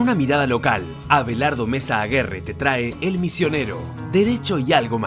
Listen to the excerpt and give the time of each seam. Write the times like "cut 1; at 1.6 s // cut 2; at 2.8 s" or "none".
none